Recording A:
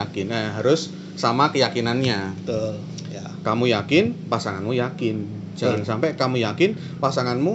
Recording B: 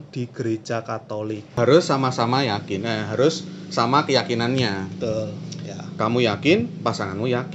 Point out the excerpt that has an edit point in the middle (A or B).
B